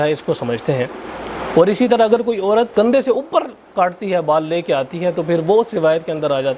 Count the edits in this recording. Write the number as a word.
two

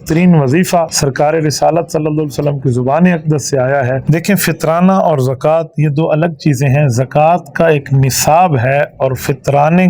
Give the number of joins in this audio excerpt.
two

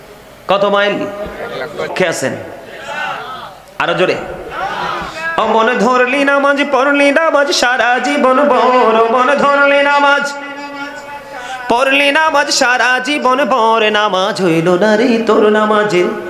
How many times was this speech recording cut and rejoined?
one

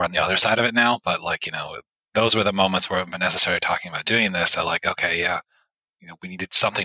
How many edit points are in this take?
zero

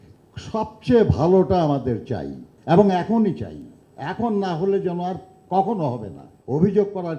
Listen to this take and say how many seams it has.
one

